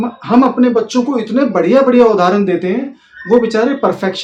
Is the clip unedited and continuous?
yes; 0 cuts

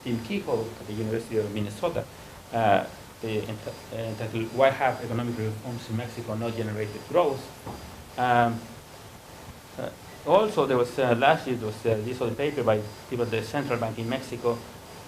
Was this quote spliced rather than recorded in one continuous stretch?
yes; 1 cut; at 11.0 s

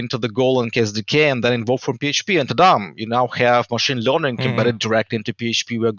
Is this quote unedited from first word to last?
yes; 0 cuts

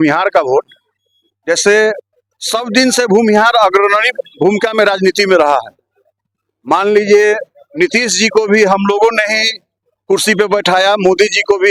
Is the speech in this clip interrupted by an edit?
no; 0 cuts

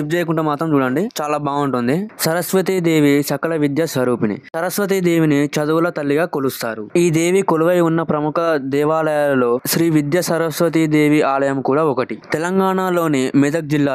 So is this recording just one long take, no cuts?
yes; 0 cuts

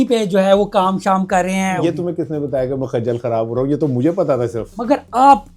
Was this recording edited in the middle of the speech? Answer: yes; 2 cuts; at 1.8 s, 4.8 s

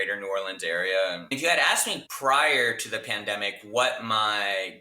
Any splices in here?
yes; 1 cut; at 1.5 s

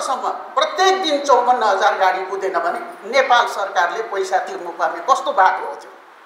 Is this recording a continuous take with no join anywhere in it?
yes; 0 cuts

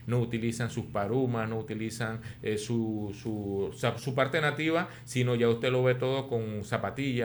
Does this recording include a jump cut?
no; 0 cuts

